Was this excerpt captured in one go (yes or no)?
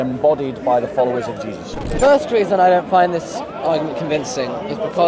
no